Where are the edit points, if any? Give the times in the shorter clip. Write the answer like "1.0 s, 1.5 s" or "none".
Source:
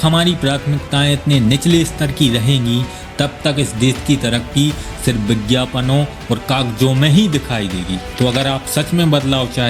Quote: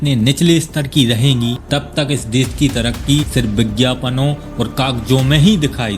1.6 s, 3.3 s